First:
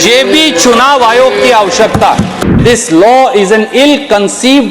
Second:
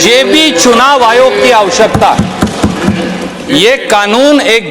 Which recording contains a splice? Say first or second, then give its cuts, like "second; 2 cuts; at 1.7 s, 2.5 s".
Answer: first; 1 cut; at 2.4 s